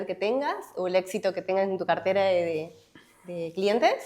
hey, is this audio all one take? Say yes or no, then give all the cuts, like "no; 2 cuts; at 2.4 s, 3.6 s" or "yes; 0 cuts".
yes; 0 cuts